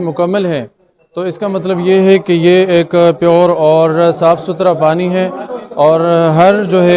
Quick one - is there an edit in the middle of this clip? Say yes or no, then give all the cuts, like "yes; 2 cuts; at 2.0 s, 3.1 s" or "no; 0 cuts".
no; 0 cuts